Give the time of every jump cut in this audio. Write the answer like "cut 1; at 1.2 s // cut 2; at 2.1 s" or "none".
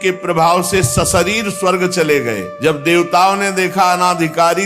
cut 1; at 2.5 s